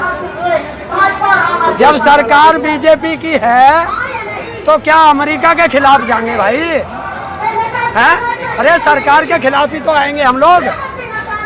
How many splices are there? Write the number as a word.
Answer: zero